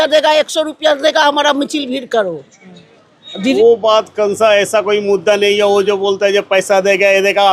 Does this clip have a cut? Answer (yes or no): yes